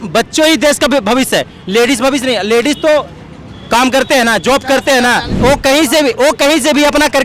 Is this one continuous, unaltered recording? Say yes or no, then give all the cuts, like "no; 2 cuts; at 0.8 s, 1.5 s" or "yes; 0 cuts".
no; 1 cut; at 5.4 s